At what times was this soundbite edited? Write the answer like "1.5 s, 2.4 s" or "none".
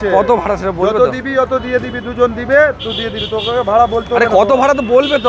none